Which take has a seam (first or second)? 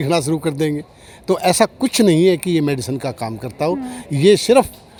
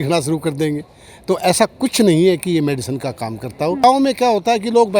second